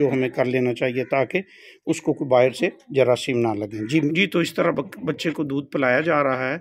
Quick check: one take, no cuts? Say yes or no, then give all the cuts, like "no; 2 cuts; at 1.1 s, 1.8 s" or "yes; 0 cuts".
no; 1 cut; at 4.1 s